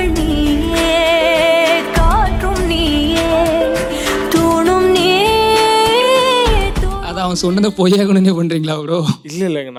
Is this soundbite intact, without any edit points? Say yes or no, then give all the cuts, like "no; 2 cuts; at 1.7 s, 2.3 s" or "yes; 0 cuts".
yes; 0 cuts